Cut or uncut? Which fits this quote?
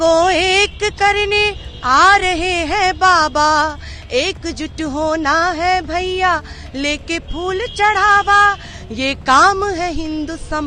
uncut